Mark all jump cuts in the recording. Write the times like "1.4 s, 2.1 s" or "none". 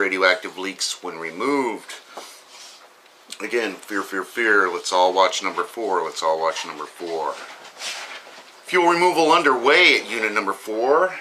none